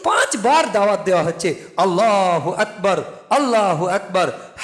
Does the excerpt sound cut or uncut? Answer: uncut